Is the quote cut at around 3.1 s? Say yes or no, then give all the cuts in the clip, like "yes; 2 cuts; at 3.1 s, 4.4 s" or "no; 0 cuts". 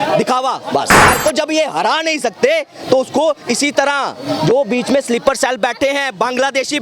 no; 1 cut; at 1.1 s